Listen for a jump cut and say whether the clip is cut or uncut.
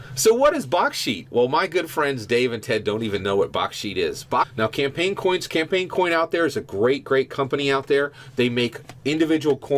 uncut